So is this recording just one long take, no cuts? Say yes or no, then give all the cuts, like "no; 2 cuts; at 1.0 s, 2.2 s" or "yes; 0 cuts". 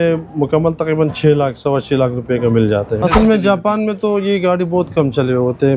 no; 1 cut; at 3.0 s